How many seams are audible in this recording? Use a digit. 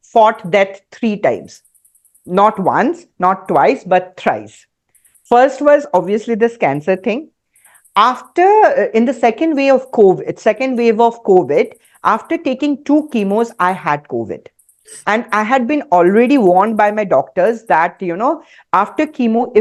0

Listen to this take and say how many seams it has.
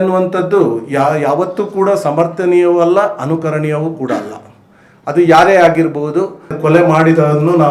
1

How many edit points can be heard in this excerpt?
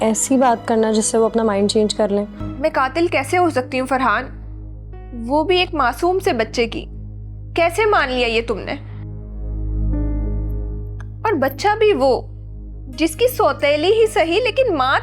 1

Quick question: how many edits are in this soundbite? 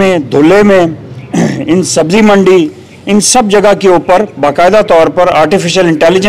0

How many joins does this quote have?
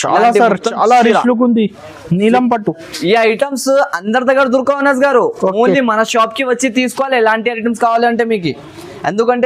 0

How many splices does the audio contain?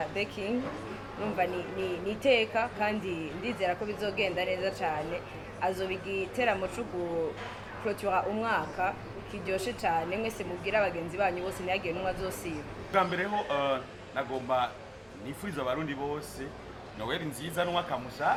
0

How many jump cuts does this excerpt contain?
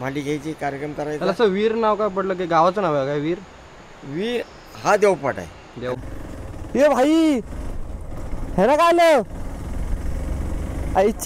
1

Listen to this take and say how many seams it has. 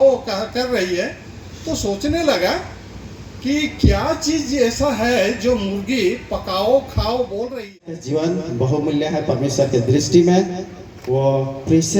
1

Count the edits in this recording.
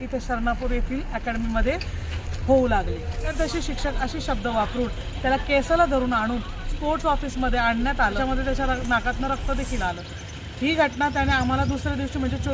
2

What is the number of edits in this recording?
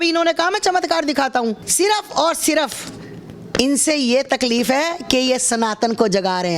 1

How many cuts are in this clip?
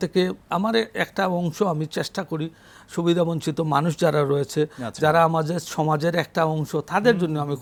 0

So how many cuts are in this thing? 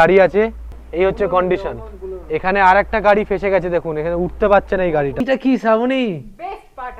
1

